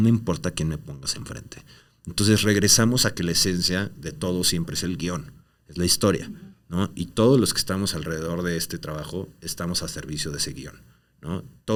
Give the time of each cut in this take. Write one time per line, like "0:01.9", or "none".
none